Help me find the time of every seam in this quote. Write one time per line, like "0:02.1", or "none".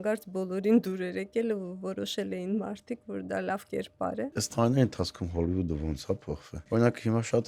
0:04.3
0:06.5

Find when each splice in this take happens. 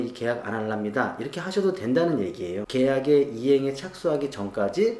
0:02.6

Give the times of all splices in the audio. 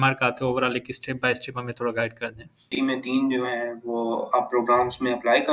0:02.7

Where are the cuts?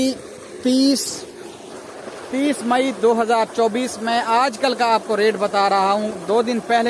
none

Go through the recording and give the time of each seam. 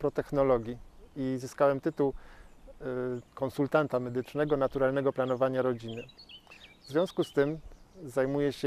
0:07.6

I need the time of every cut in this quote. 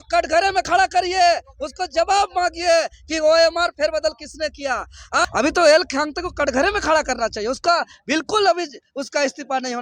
0:05.2

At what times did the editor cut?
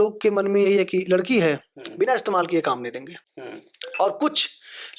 none

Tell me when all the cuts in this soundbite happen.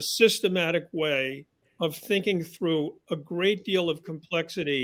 none

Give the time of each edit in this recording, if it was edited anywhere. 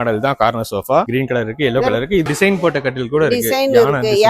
0:02.3

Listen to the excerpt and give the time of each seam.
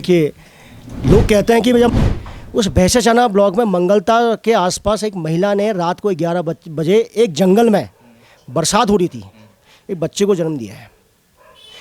0:01.9

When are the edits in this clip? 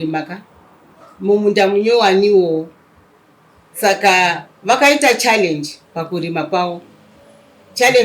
none

